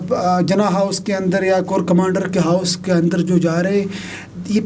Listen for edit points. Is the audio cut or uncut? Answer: uncut